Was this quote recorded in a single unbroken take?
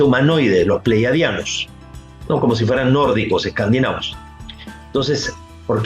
yes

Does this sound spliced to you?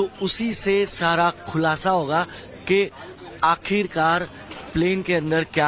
no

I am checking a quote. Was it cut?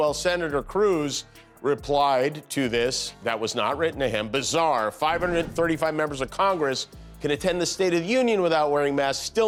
no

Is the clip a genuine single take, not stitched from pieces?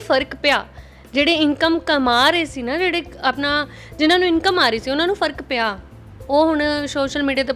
yes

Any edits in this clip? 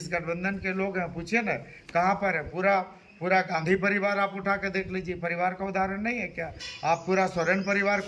no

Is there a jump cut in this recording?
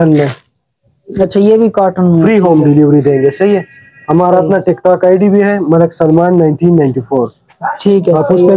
no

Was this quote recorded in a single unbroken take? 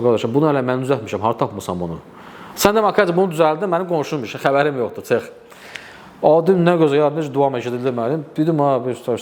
yes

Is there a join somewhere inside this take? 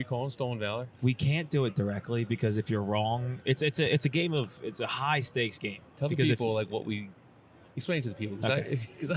no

